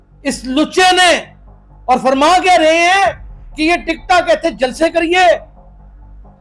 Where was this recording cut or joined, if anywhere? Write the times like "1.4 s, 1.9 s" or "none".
none